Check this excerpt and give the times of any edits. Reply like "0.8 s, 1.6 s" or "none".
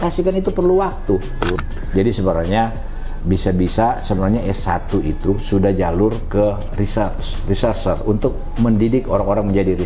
1.6 s